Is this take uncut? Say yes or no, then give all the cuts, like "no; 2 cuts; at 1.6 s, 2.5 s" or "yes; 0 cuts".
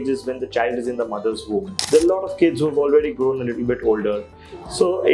no; 1 cut; at 1.8 s